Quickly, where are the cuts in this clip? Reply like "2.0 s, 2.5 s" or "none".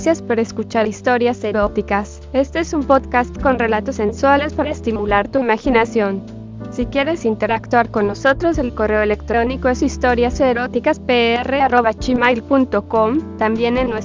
1.0 s